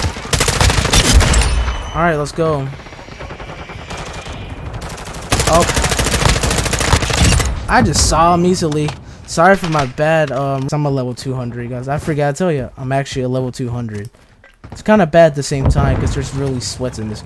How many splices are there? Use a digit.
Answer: 1